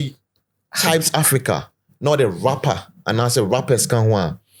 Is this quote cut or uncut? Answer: uncut